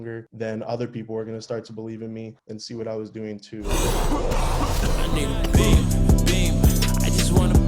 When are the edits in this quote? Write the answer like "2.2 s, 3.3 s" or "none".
3.6 s